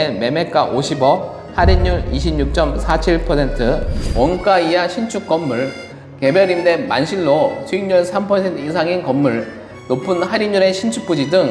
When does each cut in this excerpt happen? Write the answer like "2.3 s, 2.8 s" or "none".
4.0 s